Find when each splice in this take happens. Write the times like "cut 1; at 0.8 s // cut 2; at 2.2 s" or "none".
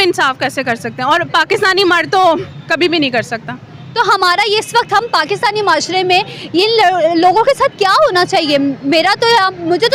none